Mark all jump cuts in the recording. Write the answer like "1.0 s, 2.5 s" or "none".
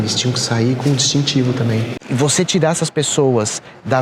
2.0 s